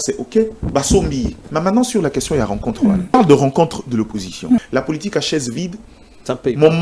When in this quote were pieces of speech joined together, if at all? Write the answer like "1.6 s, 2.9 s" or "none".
1.4 s, 3.1 s, 4.6 s